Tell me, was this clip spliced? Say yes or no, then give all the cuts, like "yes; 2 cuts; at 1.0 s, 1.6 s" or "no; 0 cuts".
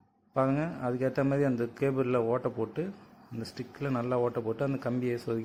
no; 0 cuts